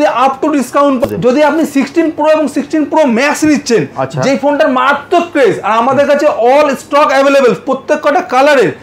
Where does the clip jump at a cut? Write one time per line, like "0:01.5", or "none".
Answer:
0:01.0